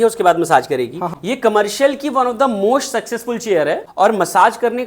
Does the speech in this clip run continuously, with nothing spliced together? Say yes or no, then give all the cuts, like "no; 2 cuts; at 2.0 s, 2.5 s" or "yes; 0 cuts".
no; 2 cuts; at 1.1 s, 3.9 s